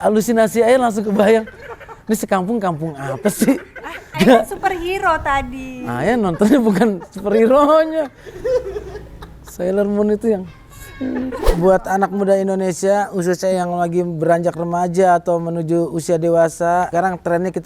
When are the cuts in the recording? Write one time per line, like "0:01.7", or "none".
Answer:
0:04.1
0:11.5
0:16.9